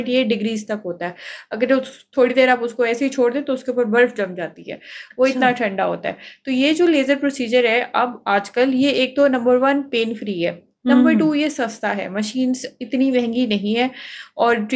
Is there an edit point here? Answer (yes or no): no